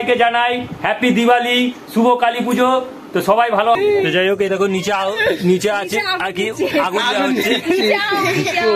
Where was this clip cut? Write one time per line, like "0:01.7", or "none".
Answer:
0:03.8